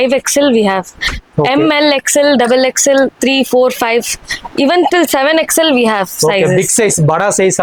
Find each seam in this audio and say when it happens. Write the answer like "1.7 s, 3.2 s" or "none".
none

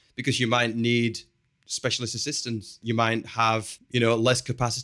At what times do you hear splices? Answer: 2.8 s, 3.8 s

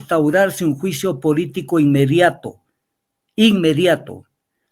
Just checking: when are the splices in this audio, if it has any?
none

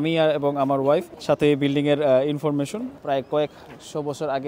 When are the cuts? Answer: 1.1 s, 2.8 s

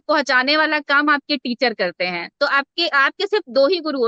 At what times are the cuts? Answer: none

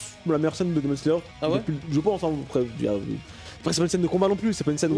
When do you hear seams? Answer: none

